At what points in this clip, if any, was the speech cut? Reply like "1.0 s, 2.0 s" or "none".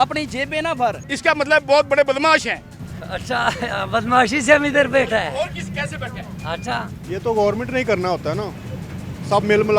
1.1 s, 7.0 s